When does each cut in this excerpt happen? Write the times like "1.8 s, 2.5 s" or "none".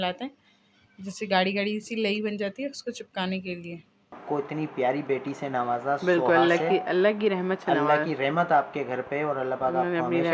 4.2 s